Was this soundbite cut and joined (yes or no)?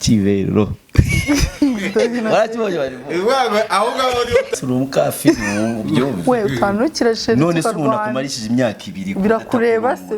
yes